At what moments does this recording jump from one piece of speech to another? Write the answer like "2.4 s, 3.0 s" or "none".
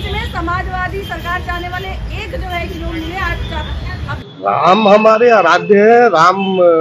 4.2 s